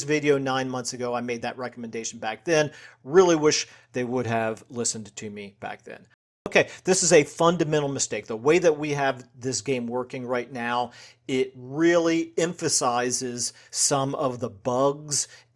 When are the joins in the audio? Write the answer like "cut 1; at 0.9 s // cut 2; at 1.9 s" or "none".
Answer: cut 1; at 6.5 s